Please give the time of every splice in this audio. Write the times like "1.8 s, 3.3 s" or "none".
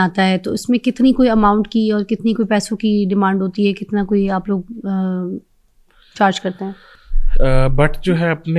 none